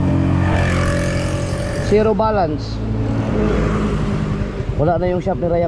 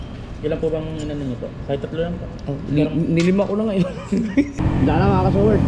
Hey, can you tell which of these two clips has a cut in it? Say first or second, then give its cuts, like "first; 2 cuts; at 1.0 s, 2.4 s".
second; 1 cut; at 4.6 s